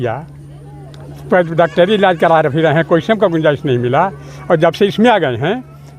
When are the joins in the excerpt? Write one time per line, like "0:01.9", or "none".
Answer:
none